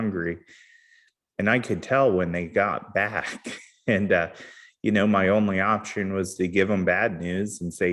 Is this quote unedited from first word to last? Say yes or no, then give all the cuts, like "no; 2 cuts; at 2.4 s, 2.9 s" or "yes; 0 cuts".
yes; 0 cuts